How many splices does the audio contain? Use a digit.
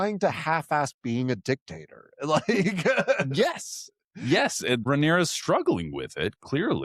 1